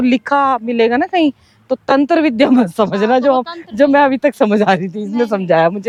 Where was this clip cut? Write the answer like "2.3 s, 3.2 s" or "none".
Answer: none